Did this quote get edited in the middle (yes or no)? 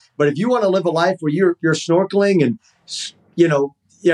no